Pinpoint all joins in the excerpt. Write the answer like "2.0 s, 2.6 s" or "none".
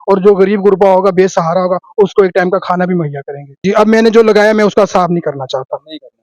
3.6 s